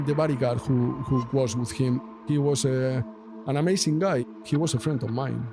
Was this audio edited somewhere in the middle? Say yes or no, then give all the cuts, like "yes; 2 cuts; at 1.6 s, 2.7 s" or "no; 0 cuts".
yes; 2 cuts; at 2.0 s, 4.3 s